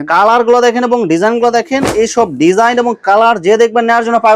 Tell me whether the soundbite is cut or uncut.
uncut